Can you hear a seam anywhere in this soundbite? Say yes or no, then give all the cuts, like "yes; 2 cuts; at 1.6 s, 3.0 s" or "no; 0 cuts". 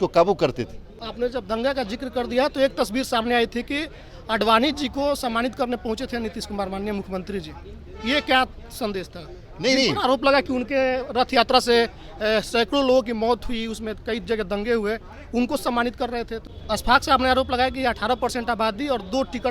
yes; 2 cuts; at 1.1 s, 16.5 s